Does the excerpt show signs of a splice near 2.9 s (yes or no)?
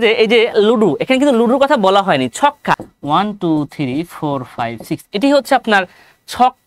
yes